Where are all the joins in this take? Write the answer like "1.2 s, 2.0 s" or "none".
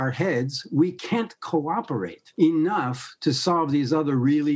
2.2 s